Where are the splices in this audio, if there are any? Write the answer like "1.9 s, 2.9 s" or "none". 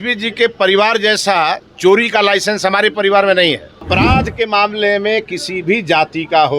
3.9 s